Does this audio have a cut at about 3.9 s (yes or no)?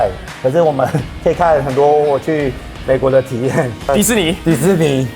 yes